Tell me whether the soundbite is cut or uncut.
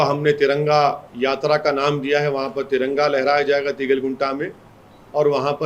uncut